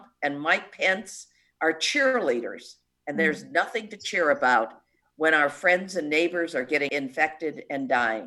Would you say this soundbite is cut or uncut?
cut